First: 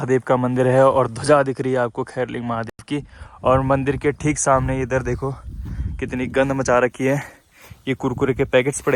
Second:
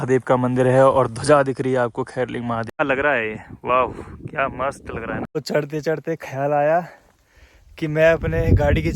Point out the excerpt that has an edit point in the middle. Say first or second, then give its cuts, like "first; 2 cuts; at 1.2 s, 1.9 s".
second; 2 cuts; at 2.8 s, 5.2 s